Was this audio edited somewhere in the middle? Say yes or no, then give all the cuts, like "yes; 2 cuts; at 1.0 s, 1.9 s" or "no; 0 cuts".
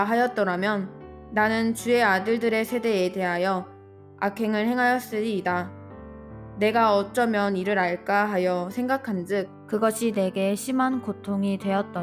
yes; 1 cut; at 9.6 s